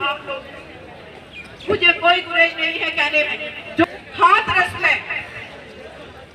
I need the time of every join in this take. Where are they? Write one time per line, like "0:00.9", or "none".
0:03.8